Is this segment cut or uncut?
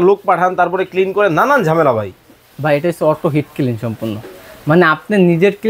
uncut